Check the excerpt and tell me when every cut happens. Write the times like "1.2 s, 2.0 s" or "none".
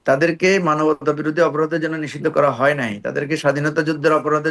none